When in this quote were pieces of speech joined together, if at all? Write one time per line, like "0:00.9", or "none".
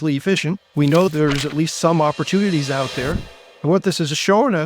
0:01.1

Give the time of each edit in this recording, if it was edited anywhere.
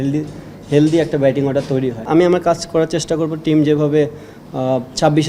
0:02.0

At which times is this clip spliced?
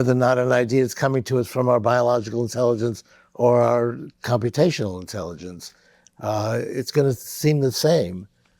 none

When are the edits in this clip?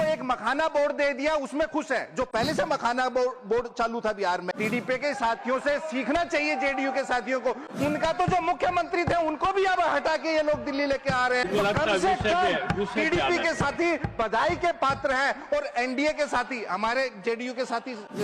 0:04.5
0:11.4

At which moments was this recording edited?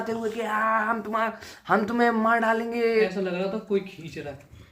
0:02.9

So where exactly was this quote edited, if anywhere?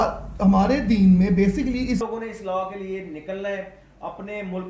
0:02.0

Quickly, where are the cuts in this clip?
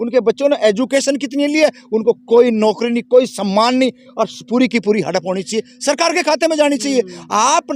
none

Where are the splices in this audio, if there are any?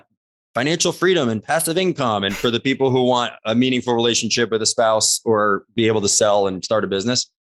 none

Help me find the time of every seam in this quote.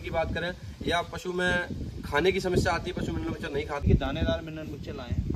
0:03.8

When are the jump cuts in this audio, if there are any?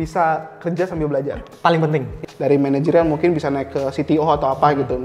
0:01.5
0:02.2

